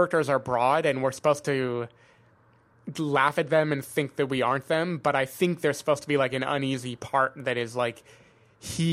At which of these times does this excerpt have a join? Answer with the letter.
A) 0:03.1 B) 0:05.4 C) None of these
C